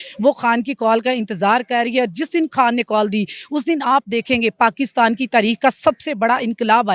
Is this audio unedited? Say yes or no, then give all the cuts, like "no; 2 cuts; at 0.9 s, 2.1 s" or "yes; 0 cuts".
yes; 0 cuts